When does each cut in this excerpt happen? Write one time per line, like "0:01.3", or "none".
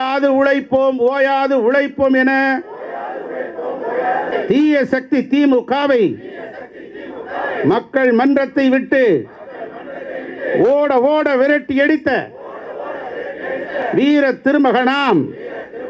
0:04.3
0:13.8